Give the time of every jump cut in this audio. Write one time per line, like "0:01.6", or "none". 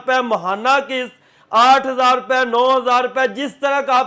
none